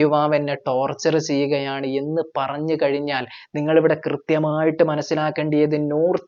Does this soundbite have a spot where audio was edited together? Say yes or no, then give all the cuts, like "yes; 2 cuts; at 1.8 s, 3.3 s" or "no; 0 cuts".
no; 0 cuts